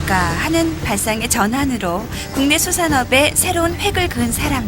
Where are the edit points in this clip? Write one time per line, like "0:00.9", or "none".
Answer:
0:02.2

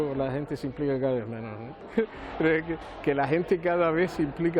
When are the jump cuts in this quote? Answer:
none

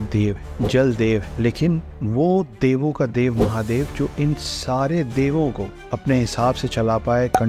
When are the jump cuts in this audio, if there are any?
none

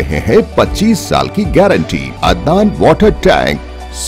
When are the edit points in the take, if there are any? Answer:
0:02.1

